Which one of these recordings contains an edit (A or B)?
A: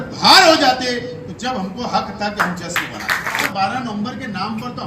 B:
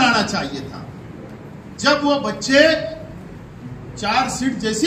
A